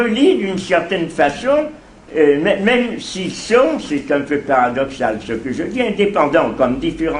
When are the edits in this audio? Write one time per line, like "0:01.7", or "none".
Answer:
0:03.8